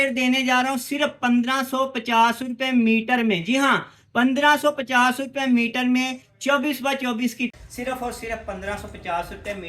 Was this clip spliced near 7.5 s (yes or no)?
yes